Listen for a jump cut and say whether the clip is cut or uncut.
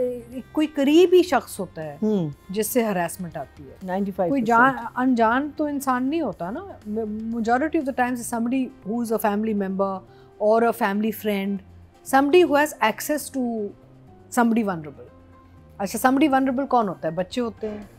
uncut